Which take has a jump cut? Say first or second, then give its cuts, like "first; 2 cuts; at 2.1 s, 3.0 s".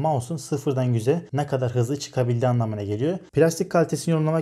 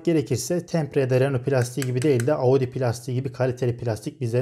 first; 2 cuts; at 1.3 s, 3.2 s